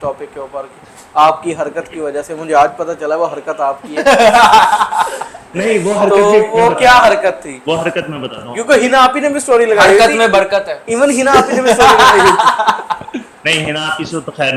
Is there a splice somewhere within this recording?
no; 0 cuts

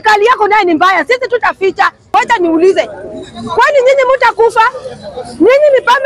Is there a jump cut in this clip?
yes; 1 cut; at 2.1 s

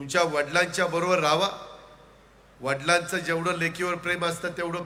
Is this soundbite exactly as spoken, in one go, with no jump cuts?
yes; 0 cuts

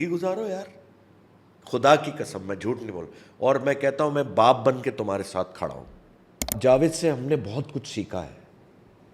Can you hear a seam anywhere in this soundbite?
yes; 1 cut; at 6.5 s

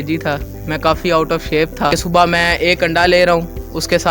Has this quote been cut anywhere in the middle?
yes; 1 cut; at 2.0 s

